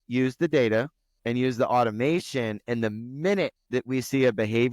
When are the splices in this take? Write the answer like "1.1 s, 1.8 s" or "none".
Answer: none